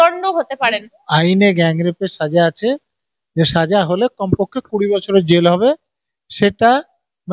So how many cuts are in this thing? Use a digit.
1